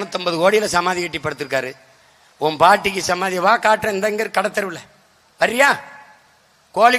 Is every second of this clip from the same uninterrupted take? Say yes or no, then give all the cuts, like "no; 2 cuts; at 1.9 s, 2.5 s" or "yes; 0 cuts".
yes; 0 cuts